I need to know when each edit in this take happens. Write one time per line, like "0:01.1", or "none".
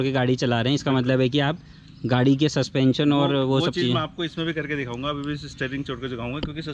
none